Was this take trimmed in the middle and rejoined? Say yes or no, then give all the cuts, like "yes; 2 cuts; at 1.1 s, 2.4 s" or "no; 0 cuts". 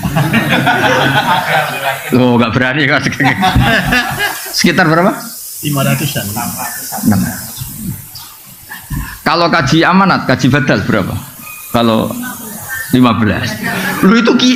no; 0 cuts